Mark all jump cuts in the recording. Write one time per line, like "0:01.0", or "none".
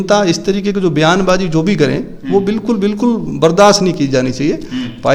none